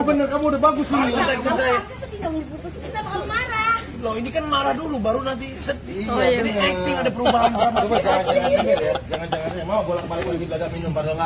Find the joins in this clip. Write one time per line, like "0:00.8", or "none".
none